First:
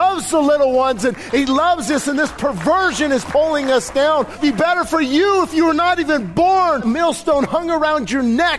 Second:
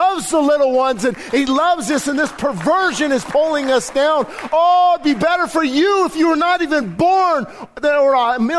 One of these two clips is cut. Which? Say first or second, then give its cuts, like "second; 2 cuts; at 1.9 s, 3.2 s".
first; 2 cuts; at 4.4 s, 6.8 s